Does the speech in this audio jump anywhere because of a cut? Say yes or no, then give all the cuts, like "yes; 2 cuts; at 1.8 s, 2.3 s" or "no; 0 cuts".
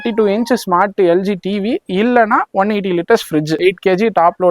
yes; 1 cut; at 3.6 s